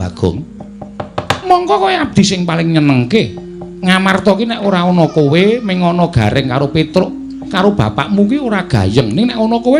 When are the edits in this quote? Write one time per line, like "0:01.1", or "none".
none